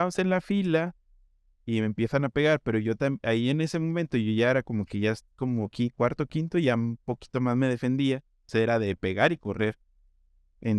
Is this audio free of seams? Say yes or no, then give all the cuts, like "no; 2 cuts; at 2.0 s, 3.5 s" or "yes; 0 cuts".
yes; 0 cuts